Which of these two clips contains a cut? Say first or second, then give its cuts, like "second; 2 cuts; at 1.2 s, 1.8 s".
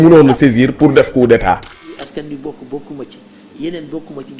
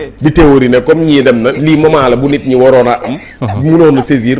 first; 1 cut; at 2.0 s